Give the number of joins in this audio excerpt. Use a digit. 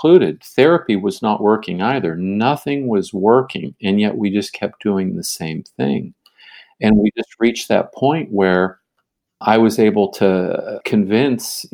1